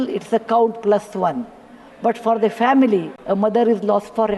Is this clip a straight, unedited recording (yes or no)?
no